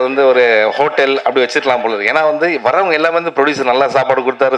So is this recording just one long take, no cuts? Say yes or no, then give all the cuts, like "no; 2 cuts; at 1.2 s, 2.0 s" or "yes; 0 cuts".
yes; 0 cuts